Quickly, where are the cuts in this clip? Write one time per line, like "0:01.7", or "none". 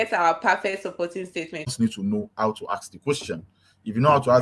0:01.7